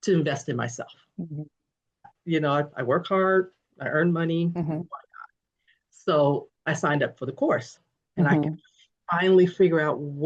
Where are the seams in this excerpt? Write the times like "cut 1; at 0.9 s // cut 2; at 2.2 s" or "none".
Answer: cut 1; at 2.1 s // cut 2; at 6.5 s